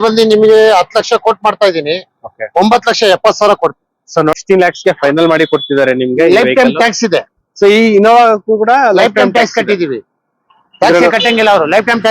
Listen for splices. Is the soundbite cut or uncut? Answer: cut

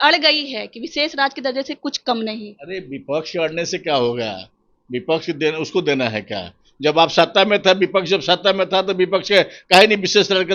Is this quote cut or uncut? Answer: uncut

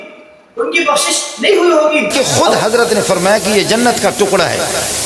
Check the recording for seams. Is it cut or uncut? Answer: cut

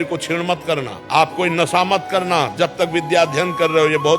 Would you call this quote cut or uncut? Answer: cut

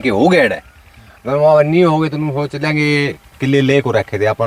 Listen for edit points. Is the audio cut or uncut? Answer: uncut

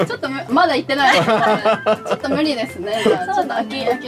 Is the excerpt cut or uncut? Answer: uncut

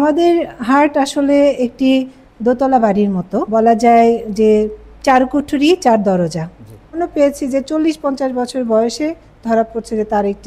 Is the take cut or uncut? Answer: cut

